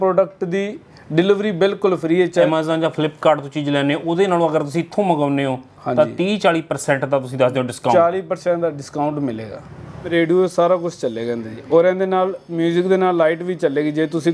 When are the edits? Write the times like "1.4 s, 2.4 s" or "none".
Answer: 2.5 s, 10.1 s

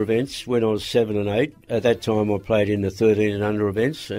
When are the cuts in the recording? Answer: 1.6 s

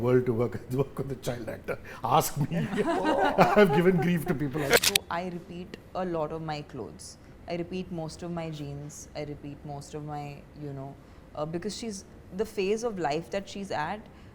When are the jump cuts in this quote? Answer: 4.8 s

